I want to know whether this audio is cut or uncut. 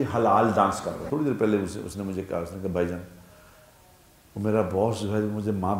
cut